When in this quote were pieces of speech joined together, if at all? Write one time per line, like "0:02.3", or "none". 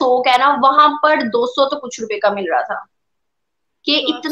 none